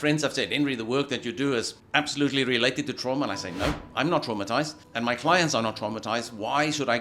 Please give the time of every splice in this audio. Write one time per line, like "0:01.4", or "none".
0:01.8
0:04.8